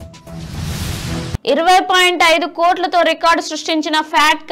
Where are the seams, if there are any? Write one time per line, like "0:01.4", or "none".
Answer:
0:01.4